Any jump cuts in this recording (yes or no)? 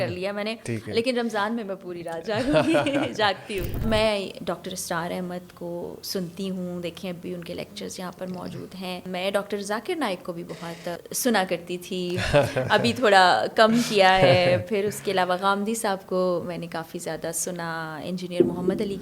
yes